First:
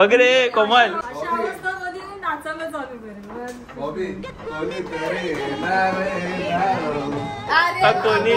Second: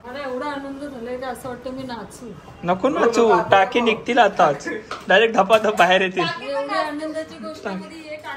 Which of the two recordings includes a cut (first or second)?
first